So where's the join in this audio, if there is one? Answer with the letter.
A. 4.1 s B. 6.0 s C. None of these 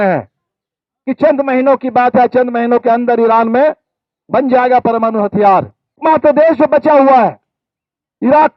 B